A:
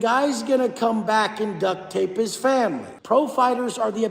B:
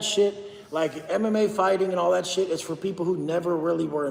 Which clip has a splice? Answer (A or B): A